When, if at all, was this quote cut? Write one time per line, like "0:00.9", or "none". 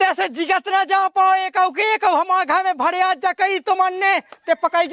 none

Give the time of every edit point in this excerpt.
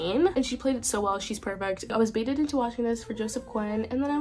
0:01.9

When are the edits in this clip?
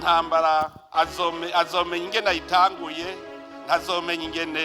0:02.3

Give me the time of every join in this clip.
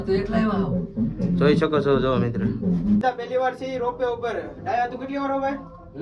0:03.0

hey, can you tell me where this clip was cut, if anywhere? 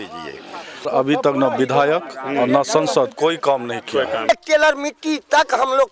0:00.9
0:04.3

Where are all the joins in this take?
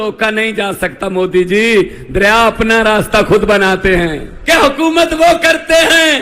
0:04.3

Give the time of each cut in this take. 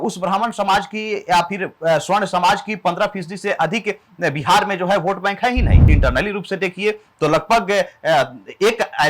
0:05.8

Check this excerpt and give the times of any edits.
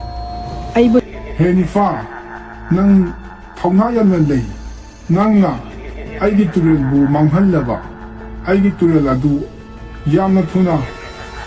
0:01.0

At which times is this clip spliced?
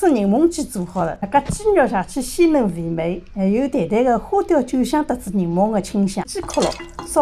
0:01.2
0:06.3

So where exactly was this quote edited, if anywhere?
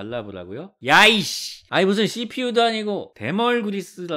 none

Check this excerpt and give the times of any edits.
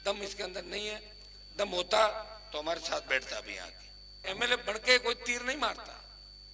0:04.2

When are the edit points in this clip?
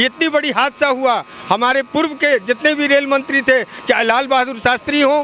none

